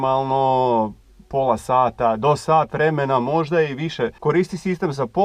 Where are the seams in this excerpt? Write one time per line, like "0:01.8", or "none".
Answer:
0:04.2